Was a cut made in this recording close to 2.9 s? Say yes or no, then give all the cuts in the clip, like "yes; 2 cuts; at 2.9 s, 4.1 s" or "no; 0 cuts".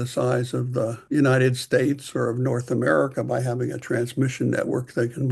no; 1 cut; at 1.0 s